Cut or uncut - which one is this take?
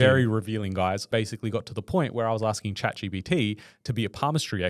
cut